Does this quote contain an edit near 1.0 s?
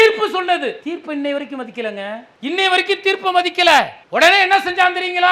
no; 2 cuts; at 2.3 s, 4.0 s

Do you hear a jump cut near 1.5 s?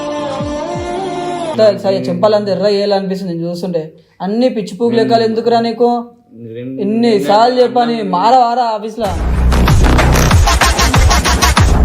yes; 1 cut; at 1.5 s

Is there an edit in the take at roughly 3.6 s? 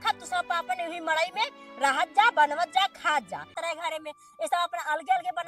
yes; 1 cut; at 3.6 s

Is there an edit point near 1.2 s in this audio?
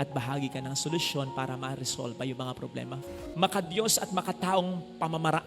no; 1 cut; at 3.2 s

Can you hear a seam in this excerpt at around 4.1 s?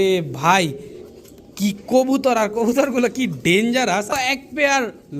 yes; 1 cut; at 4.1 s

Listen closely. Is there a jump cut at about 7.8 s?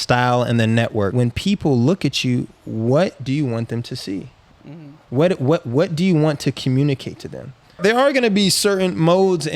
yes; 2 cuts; at 1.1 s, 7.8 s

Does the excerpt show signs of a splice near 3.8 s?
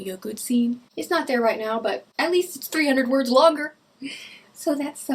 no; 2 cuts; at 0.9 s, 2.1 s

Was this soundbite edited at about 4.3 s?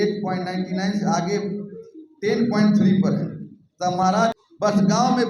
yes; 1 cut; at 4.3 s

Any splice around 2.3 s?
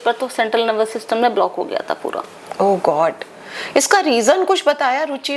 no; 0 cuts

